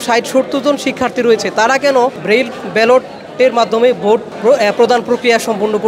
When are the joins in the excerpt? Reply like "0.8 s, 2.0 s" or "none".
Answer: 2.2 s, 4.3 s